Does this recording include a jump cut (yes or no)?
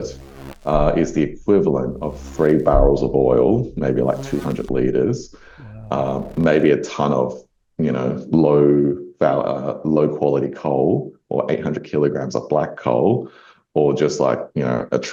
no